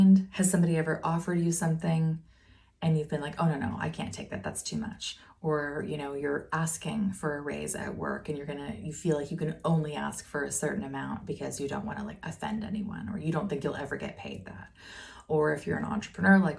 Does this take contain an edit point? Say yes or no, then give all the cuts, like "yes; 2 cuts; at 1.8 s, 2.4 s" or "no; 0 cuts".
no; 0 cuts